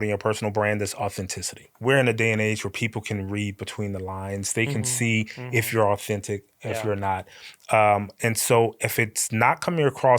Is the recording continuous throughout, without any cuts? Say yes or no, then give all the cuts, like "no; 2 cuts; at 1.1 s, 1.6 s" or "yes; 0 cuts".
no; 1 cut; at 1.6 s